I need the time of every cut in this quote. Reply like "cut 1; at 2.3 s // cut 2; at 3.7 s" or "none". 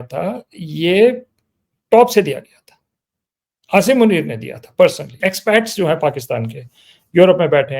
cut 1; at 5.2 s